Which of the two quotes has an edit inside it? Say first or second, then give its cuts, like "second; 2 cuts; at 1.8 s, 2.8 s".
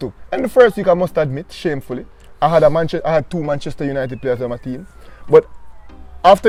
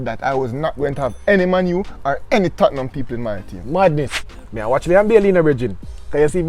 second; 1 cut; at 4.2 s